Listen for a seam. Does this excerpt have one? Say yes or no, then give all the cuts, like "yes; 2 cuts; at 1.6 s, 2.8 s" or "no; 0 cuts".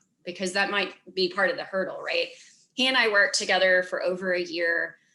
no; 0 cuts